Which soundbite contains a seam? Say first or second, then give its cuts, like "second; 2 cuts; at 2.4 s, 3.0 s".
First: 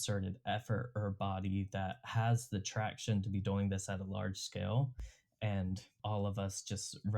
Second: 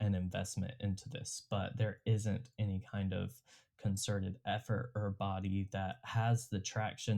first; 1 cut; at 5.9 s